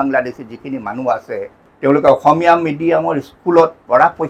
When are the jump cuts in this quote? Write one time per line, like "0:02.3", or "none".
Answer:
0:01.6

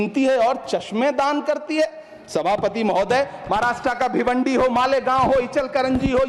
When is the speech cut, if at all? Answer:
none

